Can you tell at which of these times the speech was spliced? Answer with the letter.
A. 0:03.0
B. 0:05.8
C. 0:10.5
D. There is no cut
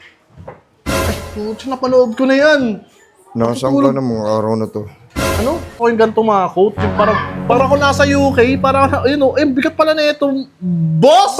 B